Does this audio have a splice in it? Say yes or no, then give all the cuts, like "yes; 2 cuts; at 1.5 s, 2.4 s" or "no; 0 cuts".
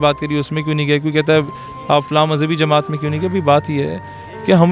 no; 0 cuts